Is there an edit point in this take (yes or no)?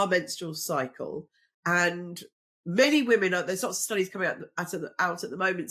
no